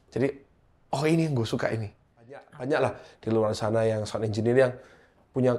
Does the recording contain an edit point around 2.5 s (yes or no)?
yes